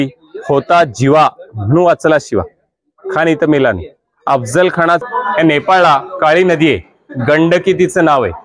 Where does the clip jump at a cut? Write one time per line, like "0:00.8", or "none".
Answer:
0:05.0